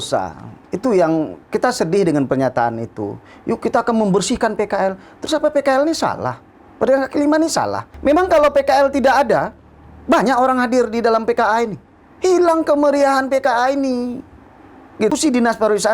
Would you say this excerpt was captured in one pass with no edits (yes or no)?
no